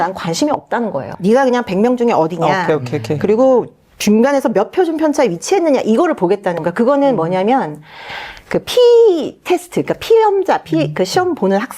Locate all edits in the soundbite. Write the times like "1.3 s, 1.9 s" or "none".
1.1 s